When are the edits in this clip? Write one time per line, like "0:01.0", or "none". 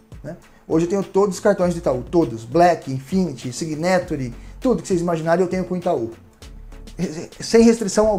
none